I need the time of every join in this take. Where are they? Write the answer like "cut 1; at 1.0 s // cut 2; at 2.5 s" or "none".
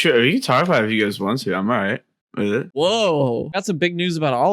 cut 1; at 2.7 s // cut 2; at 3.6 s